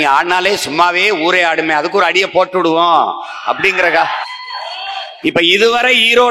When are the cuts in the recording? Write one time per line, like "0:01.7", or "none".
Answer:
0:04.2